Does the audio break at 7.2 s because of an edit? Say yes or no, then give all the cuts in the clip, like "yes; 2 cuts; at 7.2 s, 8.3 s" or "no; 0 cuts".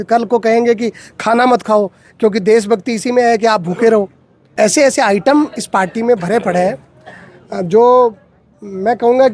no; 1 cut; at 4.4 s